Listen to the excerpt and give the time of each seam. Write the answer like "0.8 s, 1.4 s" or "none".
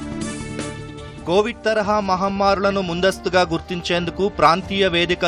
none